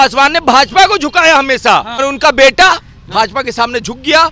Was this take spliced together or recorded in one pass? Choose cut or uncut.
cut